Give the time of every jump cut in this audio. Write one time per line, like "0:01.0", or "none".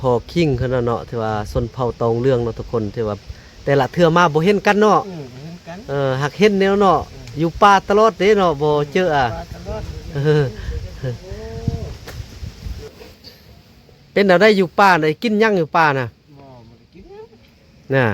0:12.9

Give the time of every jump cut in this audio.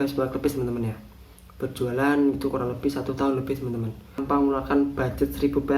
0:04.2

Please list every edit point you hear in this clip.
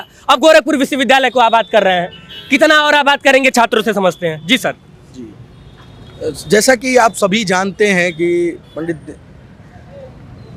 none

